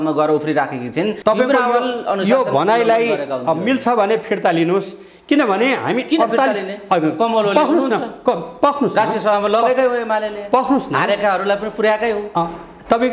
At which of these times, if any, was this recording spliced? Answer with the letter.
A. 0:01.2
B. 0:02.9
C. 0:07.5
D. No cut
A